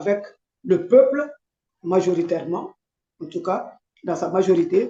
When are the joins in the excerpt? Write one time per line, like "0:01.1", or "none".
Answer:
none